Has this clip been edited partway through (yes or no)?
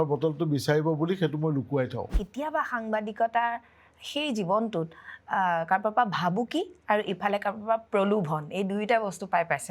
yes